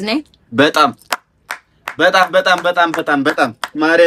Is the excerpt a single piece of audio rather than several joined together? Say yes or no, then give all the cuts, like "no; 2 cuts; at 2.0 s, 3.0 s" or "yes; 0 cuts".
yes; 0 cuts